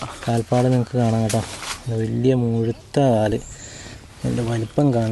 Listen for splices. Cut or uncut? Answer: uncut